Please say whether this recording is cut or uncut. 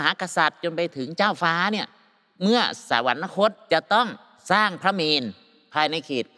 cut